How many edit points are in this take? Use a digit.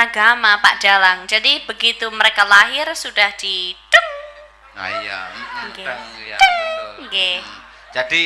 0